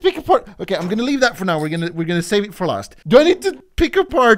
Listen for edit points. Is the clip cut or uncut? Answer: cut